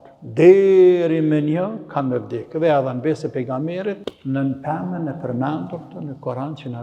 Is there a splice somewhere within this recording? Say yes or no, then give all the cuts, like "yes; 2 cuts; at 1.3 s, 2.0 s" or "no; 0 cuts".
yes; 1 cut; at 4.1 s